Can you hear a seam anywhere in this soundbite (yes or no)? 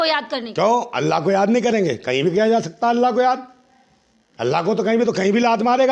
no